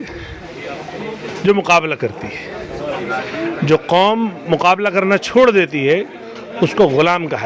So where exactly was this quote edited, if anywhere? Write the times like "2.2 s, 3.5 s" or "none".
none